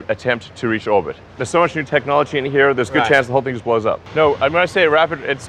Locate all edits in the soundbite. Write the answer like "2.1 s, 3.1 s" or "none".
4.0 s